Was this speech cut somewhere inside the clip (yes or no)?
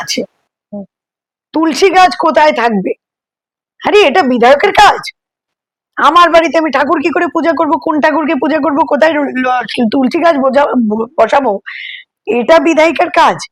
no